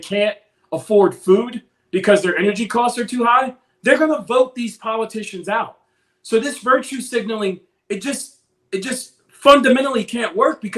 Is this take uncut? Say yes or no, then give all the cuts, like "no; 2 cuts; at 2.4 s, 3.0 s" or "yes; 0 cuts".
yes; 0 cuts